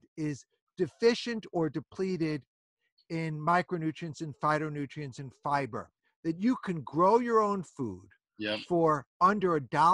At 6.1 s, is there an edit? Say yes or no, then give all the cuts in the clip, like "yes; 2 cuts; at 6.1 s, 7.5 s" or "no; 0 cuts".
yes; 1 cut; at 6.1 s